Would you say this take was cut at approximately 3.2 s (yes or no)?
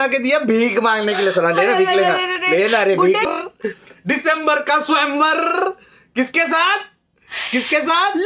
yes